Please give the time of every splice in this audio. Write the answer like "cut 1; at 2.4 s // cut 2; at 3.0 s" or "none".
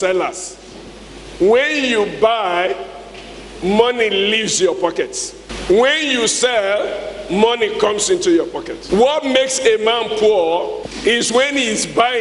cut 1; at 8.7 s // cut 2; at 10.8 s